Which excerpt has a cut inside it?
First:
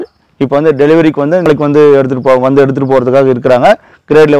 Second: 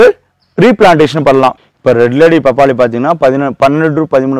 second; 1 cut; at 1.7 s

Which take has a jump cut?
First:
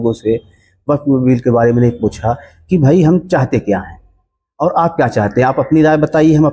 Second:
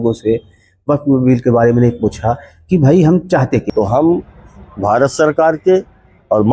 second; 1 cut; at 3.6 s

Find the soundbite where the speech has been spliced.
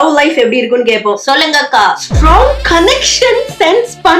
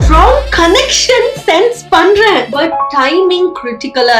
first; 1 cut; at 1.2 s

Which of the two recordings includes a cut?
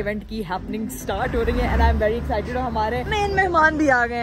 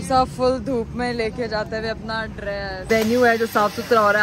second; 1 cut; at 2.8 s

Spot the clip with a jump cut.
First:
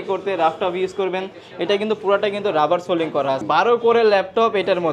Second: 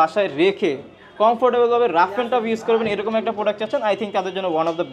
first; 1 cut; at 3.4 s

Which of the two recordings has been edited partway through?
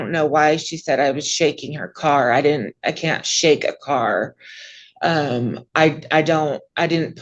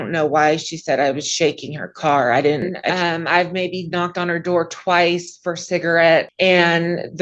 second; 2 cuts; at 2.8 s, 6.3 s

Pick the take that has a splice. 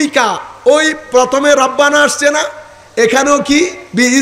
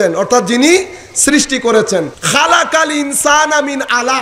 second; 1 cut; at 2.2 s

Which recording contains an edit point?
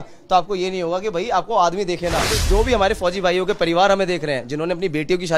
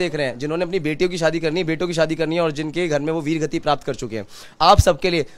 first; 1 cut; at 2.4 s

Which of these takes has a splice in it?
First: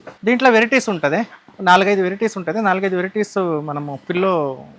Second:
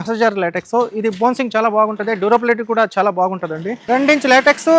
second; 1 cut; at 3.7 s

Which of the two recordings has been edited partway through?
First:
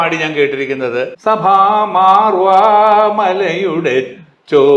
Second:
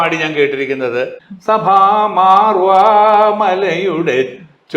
first; 1 cut; at 1.1 s

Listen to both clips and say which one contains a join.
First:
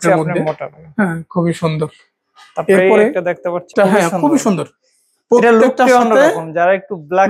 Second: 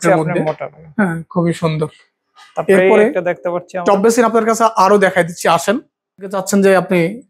first; 1 cut; at 3.7 s

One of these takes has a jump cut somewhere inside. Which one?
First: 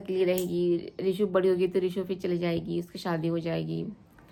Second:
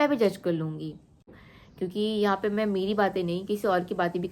second; 1 cut; at 1.3 s

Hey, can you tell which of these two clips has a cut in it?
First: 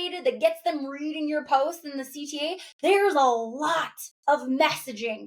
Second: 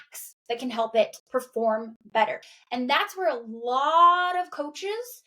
second; 1 cut; at 2.4 s

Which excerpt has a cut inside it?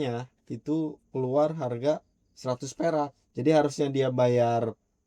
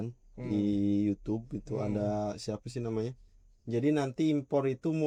first; 1 cut; at 3.2 s

